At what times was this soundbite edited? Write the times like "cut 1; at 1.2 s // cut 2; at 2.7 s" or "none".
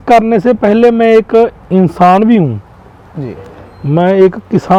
none